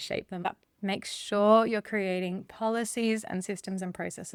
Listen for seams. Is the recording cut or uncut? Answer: uncut